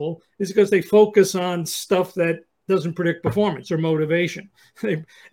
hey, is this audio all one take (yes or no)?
yes